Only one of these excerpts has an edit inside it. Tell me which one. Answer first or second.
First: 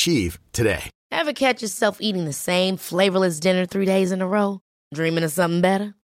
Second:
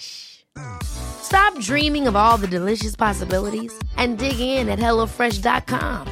first